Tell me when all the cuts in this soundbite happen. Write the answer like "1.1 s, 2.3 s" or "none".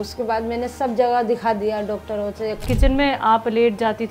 2.6 s

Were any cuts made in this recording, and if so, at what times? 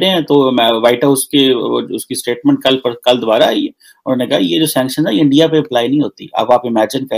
none

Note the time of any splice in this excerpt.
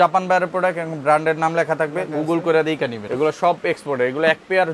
3.0 s

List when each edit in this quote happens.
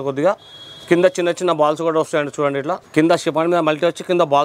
2.8 s

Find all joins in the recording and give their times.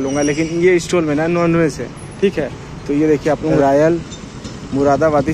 3.6 s

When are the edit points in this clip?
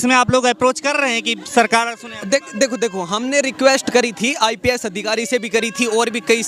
none

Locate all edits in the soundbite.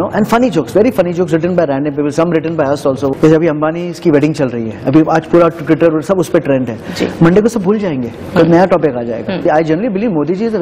3.1 s, 9.4 s

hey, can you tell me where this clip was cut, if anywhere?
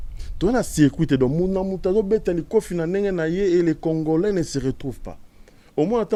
none

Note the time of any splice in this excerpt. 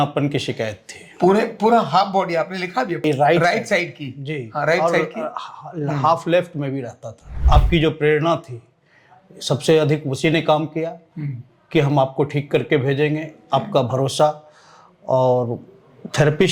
3.0 s, 7.4 s

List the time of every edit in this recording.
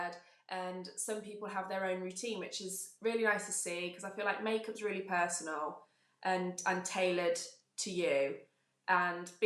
none

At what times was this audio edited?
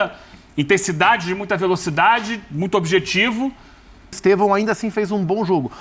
4.2 s

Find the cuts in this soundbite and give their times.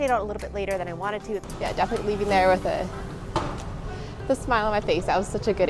1.4 s

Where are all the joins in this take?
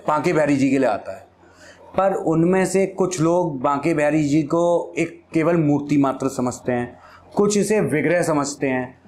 none

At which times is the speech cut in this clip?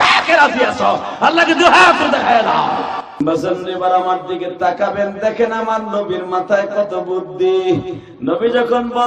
3.0 s

